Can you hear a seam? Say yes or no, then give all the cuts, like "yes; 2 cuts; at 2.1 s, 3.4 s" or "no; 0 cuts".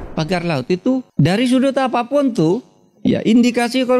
yes; 1 cut; at 1.1 s